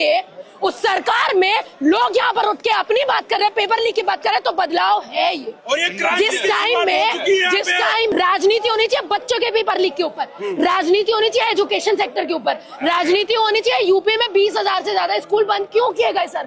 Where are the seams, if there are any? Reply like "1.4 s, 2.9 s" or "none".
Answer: 8.1 s